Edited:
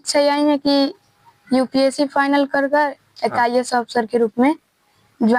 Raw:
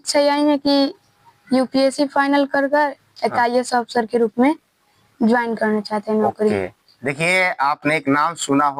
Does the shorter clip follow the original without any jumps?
yes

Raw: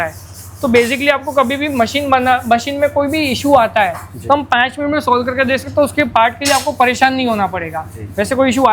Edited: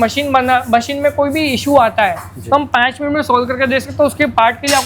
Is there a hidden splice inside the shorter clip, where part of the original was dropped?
no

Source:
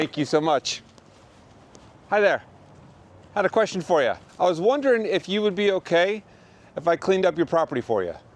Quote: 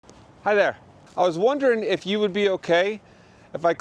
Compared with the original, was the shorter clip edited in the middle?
yes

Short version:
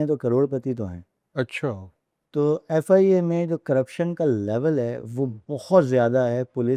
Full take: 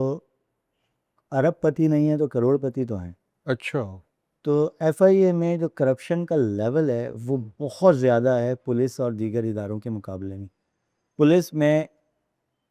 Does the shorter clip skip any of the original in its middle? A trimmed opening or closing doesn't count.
no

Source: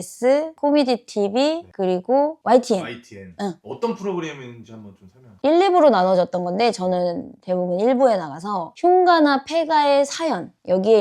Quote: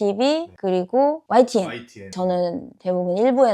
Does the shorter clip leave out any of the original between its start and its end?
yes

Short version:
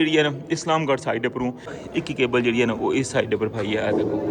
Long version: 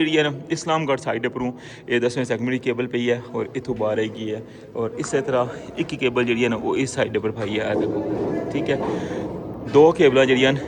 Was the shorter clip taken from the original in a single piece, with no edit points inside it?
no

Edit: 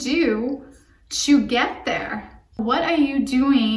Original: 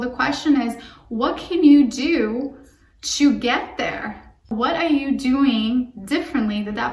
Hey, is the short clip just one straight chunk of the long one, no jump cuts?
yes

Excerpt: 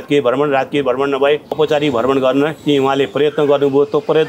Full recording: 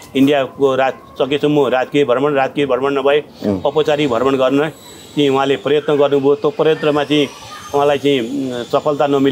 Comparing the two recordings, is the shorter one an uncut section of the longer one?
no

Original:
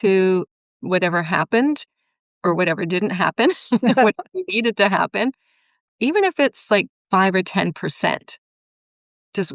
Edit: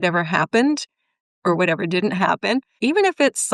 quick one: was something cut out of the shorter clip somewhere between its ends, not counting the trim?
yes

